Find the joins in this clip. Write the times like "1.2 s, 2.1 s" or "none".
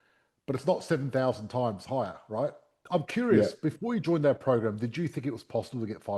2.8 s

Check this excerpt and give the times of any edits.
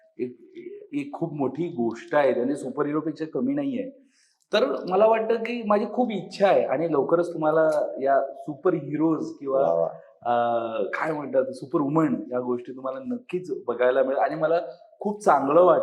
none

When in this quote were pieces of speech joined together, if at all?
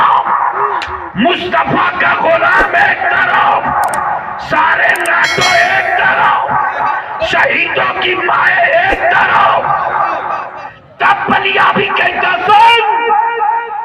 10.7 s

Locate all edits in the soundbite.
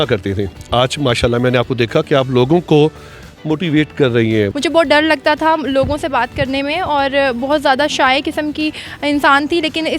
4.5 s

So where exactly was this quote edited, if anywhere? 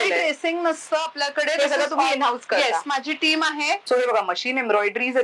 3.8 s

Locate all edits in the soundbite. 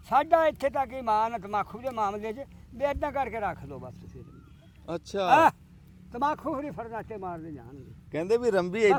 none

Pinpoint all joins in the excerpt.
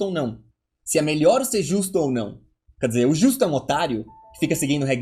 none

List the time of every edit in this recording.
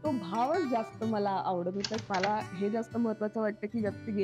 2.1 s

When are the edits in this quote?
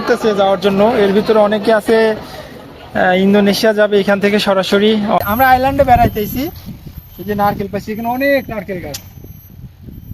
5.2 s

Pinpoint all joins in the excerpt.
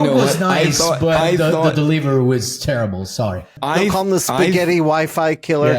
3.5 s

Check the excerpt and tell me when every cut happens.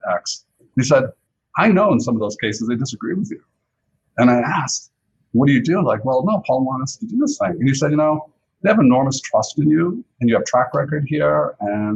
1.2 s

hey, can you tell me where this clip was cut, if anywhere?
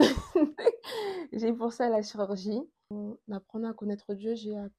2.9 s

